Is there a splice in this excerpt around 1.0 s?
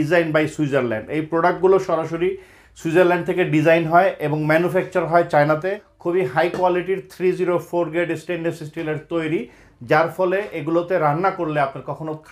no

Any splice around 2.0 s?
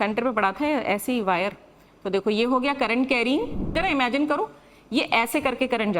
no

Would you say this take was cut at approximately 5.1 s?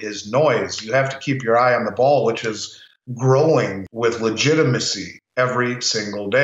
no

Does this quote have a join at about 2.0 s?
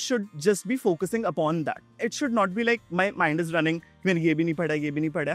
yes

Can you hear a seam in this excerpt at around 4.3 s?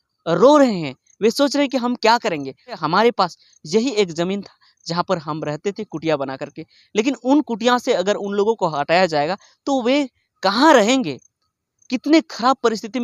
no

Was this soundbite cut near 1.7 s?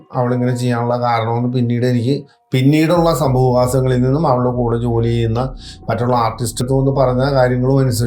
no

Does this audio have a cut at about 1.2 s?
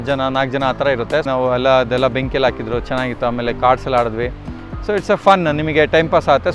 yes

